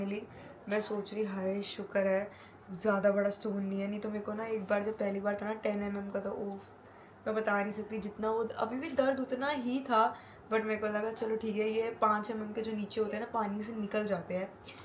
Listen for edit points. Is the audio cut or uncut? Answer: uncut